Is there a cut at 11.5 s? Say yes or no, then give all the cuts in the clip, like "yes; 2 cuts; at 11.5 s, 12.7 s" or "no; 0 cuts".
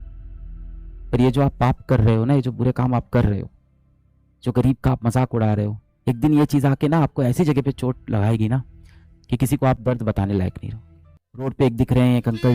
yes; 1 cut; at 11.5 s